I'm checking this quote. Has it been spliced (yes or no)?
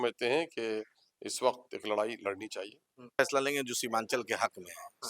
yes